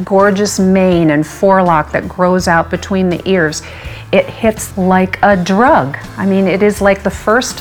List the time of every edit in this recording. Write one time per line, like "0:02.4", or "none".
0:04.6